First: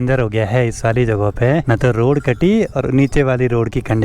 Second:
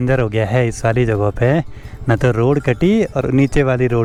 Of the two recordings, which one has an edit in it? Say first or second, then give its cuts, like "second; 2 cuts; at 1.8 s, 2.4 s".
first; 1 cut; at 1.6 s